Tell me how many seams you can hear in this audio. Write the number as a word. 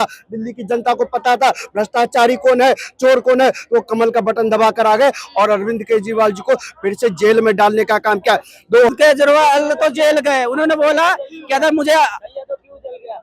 one